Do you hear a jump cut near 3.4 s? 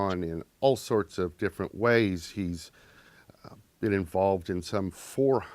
yes; 1 cut; at 3.4 s

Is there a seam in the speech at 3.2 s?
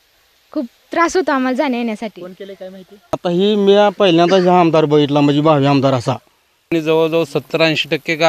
yes; 2 cuts; at 3.2 s, 6.7 s

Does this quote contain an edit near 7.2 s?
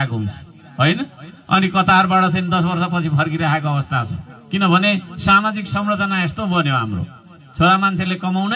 no; 0 cuts

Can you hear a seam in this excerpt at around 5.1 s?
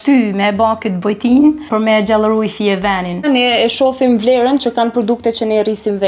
no; 2 cuts; at 1.6 s, 3.3 s

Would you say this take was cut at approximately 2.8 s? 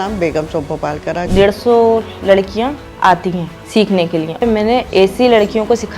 no; 1 cut; at 1.3 s

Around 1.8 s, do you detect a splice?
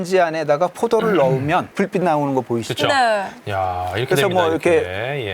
no; 1 cut; at 3.4 s

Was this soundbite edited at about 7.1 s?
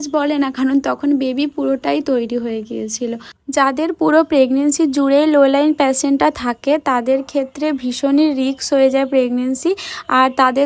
no; 1 cut; at 3.5 s

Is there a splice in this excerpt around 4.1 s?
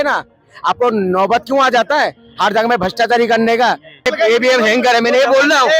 yes; 1 cut; at 4.1 s

